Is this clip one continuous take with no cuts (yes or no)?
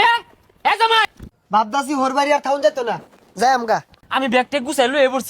no